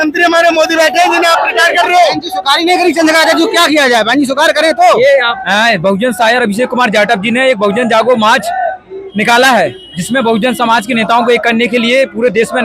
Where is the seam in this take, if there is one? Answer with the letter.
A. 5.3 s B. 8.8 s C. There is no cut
A